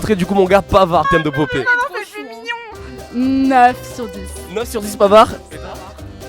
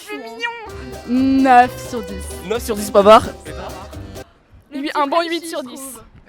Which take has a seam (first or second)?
first